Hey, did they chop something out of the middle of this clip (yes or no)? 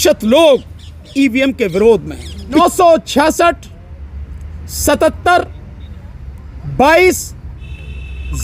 yes